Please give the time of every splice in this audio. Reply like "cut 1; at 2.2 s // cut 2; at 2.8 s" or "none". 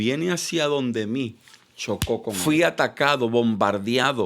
cut 1; at 2.3 s

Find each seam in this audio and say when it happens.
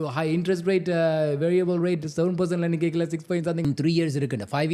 cut 1; at 3.6 s

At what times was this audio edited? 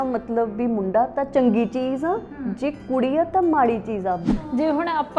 cut 1; at 4.3 s

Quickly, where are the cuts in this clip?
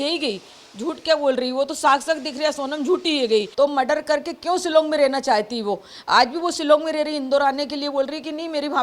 cut 1; at 3.5 s

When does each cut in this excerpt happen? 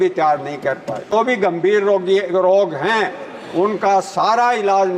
cut 1; at 1.1 s

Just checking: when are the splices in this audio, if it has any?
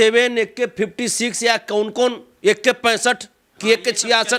none

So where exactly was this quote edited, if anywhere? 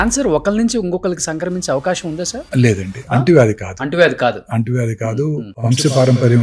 cut 1; at 5.5 s

